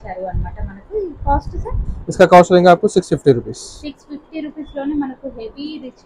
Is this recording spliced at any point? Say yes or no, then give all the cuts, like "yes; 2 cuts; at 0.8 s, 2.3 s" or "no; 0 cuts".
no; 0 cuts